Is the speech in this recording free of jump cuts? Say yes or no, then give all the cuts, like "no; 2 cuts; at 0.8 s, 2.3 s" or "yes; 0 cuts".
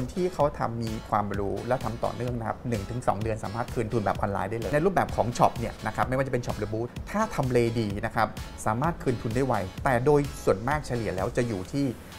no; 2 cuts; at 4.7 s, 6.9 s